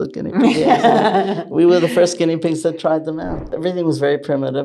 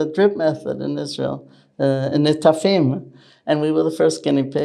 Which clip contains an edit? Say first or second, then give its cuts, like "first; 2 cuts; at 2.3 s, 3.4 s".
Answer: first; 1 cut; at 3.6 s